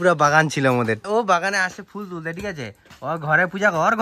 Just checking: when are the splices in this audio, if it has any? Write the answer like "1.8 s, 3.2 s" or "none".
1.0 s